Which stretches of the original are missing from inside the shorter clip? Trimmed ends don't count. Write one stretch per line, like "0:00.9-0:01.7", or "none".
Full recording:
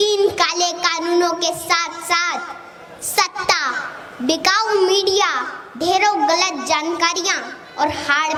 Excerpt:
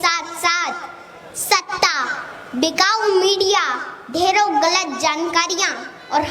none